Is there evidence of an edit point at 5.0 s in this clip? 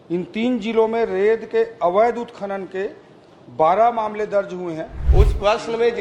yes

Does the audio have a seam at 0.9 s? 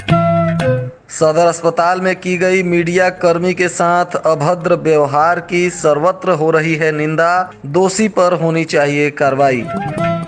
yes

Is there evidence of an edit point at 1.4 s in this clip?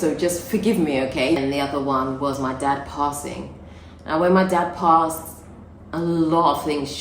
yes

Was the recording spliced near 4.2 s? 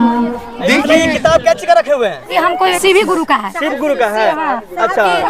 no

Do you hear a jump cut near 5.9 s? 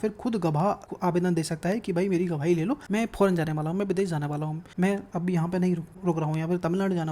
yes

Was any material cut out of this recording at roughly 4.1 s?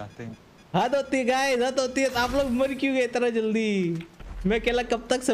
no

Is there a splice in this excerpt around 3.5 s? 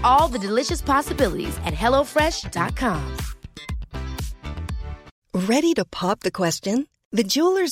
no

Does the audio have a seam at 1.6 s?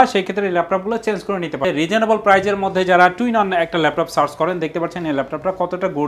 yes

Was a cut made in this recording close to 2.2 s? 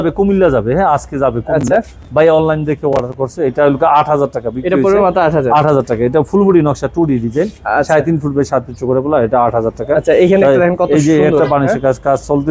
no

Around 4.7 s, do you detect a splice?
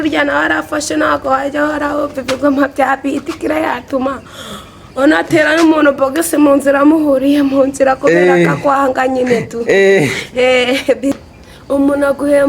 no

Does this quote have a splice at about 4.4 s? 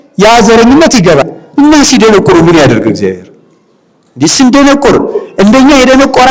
no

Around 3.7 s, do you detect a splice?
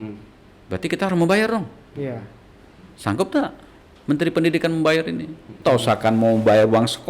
no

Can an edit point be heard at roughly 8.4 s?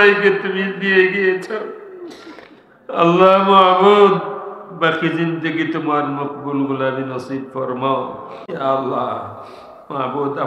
yes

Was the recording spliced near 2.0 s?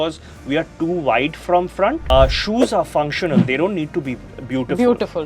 yes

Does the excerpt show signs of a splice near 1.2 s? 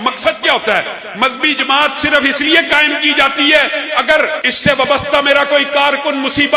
no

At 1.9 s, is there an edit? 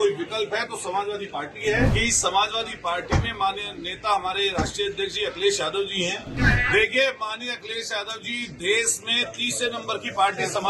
yes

